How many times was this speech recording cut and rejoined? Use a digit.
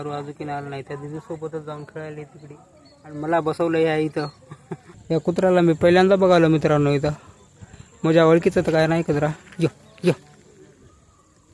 1